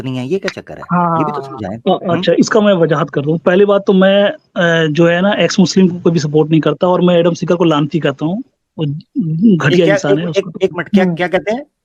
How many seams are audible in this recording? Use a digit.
0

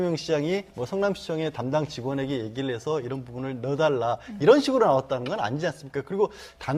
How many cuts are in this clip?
1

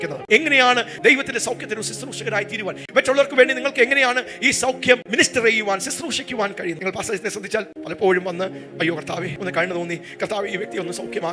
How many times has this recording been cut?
3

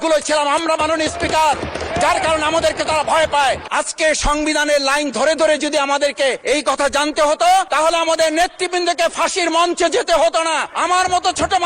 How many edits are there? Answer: 4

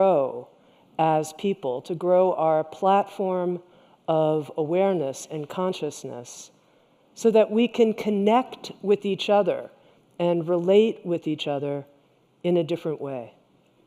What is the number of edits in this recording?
1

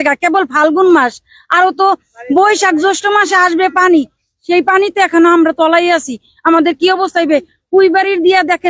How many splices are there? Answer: 0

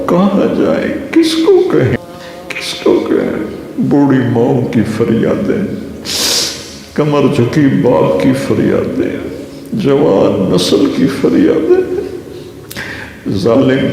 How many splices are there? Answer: 1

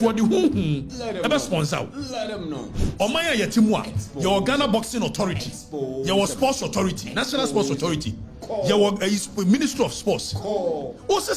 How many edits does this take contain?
1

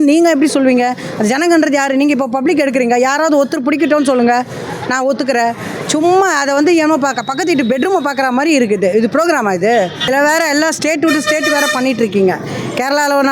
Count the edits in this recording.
0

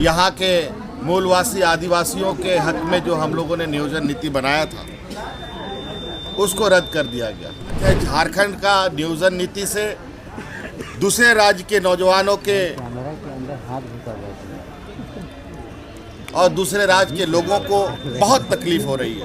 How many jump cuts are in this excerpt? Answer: 1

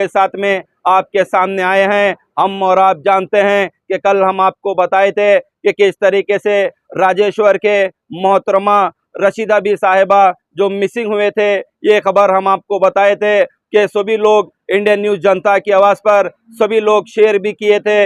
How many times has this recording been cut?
0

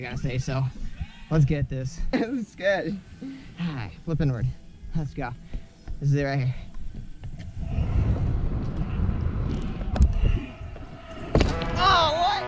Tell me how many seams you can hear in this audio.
1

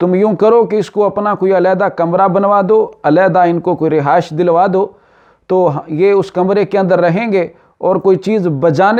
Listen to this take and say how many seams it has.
0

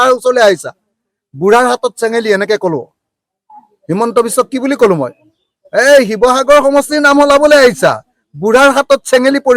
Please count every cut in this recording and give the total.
1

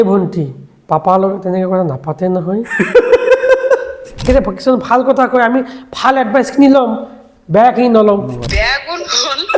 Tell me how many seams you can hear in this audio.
2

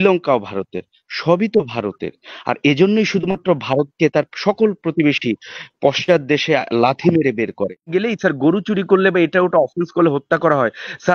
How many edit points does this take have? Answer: 1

